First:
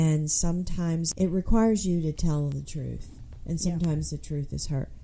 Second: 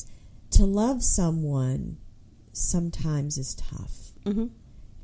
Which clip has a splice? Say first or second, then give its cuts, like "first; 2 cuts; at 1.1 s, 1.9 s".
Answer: first; 1 cut; at 1.1 s